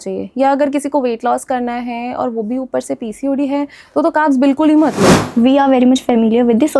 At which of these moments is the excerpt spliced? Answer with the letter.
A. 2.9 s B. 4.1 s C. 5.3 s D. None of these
C